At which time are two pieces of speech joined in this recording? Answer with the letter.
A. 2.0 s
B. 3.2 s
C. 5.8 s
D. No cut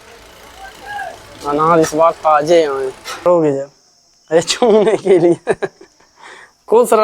B